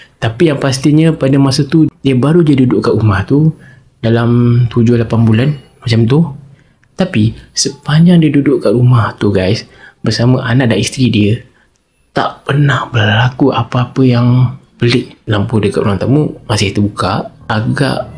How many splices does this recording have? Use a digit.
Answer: 1